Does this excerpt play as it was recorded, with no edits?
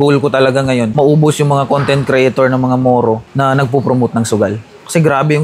no; 1 cut; at 0.9 s

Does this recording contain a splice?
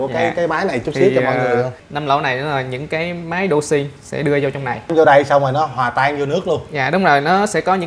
yes; 2 cuts; at 1.9 s, 4.9 s

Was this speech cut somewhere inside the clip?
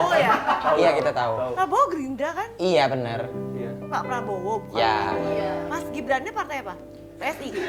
no; 0 cuts

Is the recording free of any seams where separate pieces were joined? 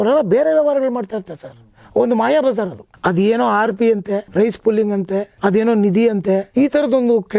no; 4 cuts; at 2.8 s, 4.3 s, 5.3 s, 6.5 s

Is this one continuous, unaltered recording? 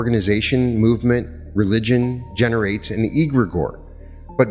yes; 0 cuts

